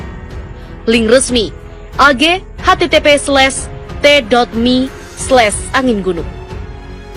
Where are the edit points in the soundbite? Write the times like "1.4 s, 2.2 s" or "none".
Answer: 6.3 s

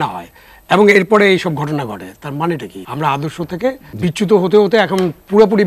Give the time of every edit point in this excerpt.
2.8 s, 3.9 s

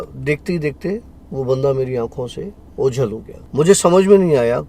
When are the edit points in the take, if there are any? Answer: 3.3 s

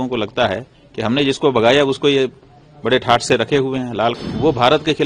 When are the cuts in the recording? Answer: 4.2 s

